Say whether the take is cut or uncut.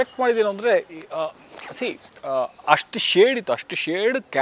uncut